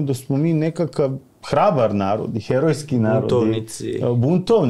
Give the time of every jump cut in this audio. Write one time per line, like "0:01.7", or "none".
none